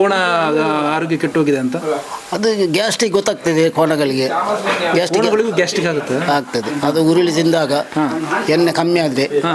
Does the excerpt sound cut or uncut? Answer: uncut